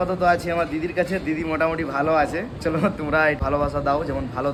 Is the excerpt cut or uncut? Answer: uncut